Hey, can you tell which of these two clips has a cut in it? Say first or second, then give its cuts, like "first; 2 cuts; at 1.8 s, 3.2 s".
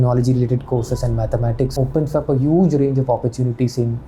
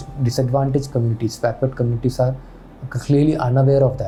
first; 1 cut; at 1.7 s